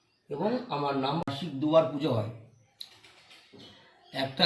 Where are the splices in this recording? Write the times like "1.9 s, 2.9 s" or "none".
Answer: 1.3 s